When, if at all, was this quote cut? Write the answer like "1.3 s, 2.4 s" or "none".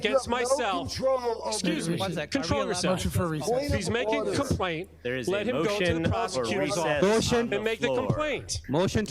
none